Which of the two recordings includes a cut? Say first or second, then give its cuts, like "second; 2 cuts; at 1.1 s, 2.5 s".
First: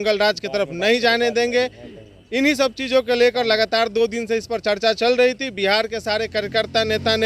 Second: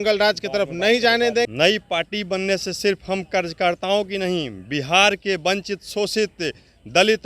second; 1 cut; at 1.5 s